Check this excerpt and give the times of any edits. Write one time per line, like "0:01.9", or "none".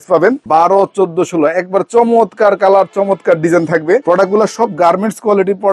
none